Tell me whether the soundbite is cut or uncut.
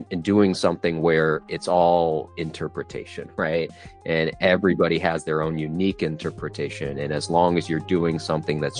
uncut